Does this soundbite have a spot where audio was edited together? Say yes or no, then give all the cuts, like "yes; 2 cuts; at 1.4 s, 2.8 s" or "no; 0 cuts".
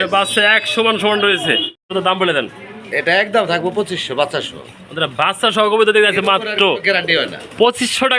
yes; 1 cut; at 1.8 s